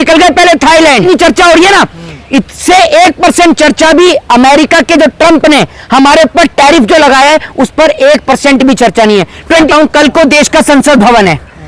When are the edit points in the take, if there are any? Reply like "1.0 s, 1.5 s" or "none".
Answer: 1.0 s, 9.7 s